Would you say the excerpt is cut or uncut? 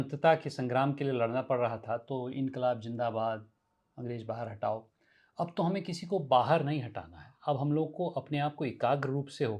uncut